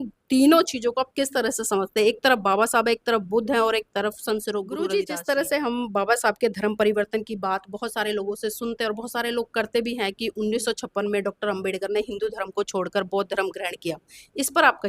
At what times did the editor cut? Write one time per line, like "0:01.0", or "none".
0:04.9

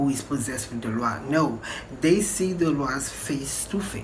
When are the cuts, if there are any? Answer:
none

